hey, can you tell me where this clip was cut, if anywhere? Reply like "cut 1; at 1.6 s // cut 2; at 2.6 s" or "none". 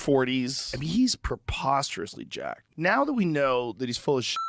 none